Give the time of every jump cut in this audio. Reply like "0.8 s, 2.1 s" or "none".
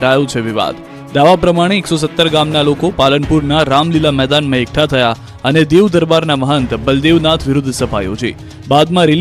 5.3 s